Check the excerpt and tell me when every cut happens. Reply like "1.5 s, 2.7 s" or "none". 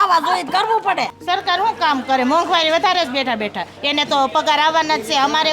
1.2 s